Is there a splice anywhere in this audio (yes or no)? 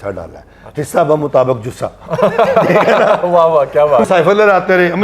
yes